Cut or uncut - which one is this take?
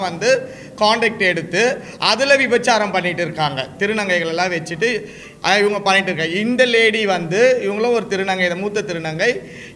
uncut